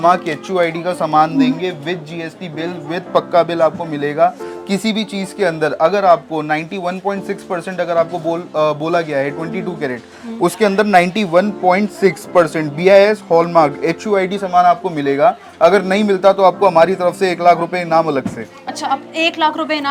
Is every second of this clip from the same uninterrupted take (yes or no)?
yes